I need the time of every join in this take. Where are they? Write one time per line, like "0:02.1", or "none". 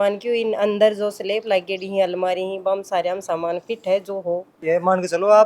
0:04.5